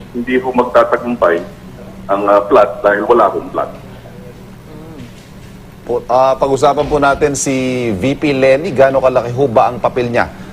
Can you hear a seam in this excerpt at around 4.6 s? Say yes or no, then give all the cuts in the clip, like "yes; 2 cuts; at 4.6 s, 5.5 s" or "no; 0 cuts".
no; 1 cut; at 2.4 s